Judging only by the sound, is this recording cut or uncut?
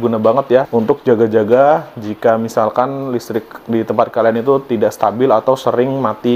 uncut